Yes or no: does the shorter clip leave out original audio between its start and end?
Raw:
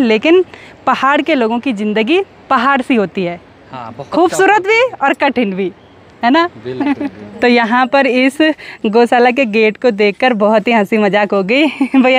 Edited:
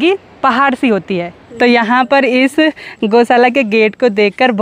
yes